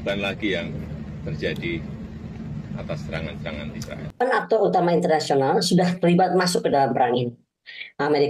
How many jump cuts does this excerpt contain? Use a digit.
1